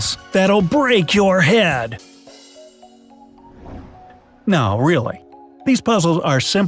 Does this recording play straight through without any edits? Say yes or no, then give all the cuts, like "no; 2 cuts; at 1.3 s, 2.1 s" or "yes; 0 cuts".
yes; 0 cuts